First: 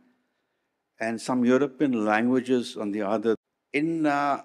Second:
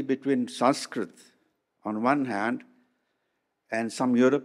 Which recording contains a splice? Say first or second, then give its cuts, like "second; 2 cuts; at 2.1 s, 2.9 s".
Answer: first; 1 cut; at 3.4 s